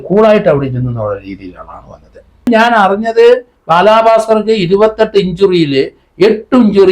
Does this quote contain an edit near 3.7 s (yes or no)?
no